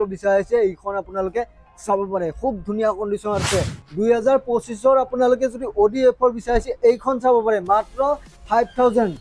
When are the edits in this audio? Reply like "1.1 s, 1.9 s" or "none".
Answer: 3.8 s